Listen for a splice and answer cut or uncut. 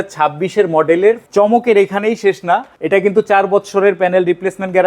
cut